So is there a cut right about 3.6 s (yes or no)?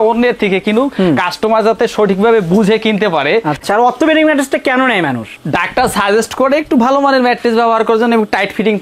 yes